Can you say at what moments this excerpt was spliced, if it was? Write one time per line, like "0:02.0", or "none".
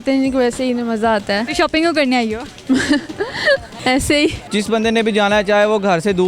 0:01.5
0:03.7
0:04.4